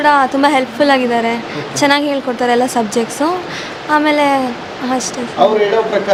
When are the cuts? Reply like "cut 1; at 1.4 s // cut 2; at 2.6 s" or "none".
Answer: none